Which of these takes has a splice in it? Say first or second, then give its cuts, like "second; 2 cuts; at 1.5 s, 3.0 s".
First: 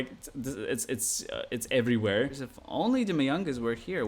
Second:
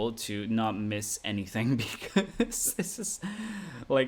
first; 1 cut; at 2.5 s